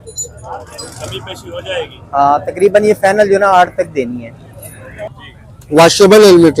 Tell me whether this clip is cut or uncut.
cut